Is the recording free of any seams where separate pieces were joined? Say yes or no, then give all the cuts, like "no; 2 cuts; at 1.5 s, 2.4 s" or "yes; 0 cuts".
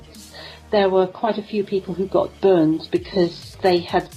yes; 0 cuts